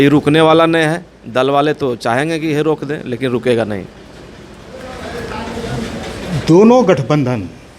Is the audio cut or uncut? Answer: uncut